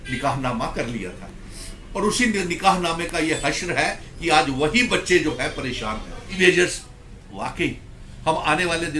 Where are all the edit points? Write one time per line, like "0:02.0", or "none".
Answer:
0:06.3